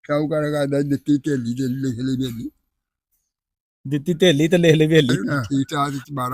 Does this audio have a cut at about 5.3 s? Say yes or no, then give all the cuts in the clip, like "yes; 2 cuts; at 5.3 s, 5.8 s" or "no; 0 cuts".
yes; 1 cut; at 5.3 s